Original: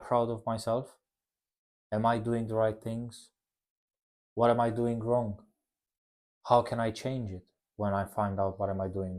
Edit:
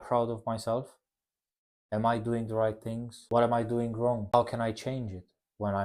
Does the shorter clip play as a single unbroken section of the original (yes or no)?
no